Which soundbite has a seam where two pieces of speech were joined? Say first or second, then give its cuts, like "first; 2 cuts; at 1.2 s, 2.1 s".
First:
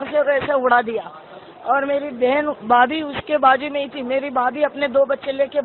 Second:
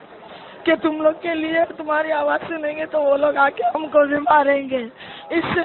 second; 1 cut; at 3.6 s